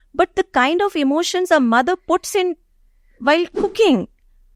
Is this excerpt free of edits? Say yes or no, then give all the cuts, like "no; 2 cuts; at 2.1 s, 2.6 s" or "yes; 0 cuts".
yes; 0 cuts